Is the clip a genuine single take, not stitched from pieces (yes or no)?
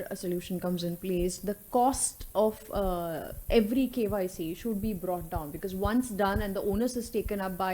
yes